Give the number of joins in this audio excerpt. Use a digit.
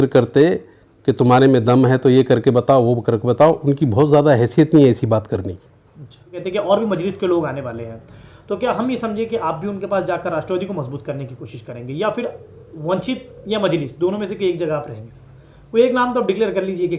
1